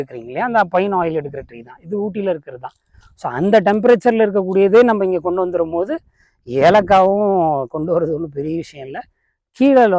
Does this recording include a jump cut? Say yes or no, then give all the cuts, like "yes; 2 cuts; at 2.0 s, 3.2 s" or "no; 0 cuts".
no; 0 cuts